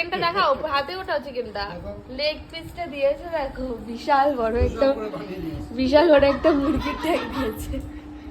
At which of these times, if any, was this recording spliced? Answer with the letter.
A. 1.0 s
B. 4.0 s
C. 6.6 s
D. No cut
D